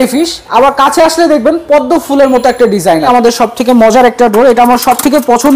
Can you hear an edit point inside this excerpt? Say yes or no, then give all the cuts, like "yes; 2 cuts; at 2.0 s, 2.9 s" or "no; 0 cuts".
yes; 1 cut; at 3.1 s